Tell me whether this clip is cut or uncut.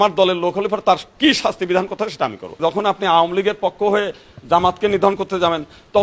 cut